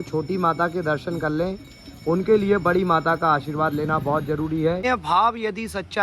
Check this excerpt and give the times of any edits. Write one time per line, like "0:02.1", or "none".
0:04.8